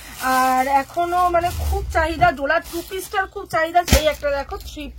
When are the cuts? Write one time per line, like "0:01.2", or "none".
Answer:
0:03.9